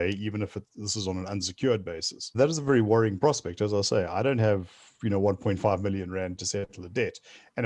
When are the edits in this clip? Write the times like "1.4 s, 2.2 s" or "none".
2.3 s, 6.4 s